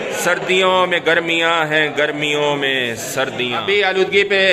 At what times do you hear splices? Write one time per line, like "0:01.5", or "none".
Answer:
0:03.6